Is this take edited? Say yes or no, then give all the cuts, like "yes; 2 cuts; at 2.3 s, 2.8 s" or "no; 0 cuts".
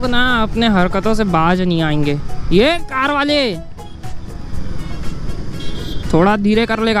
no; 0 cuts